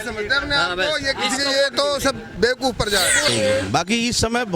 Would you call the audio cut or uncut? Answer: cut